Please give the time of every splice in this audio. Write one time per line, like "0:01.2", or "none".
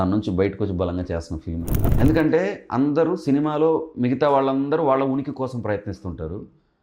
0:01.8

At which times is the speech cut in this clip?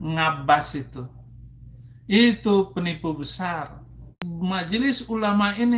0:04.3

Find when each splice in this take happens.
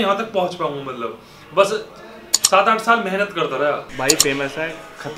0:03.9

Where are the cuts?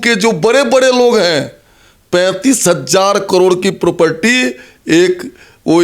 none

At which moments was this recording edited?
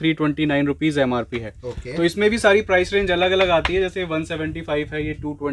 none

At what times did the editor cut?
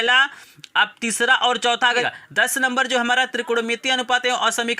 0:02.0

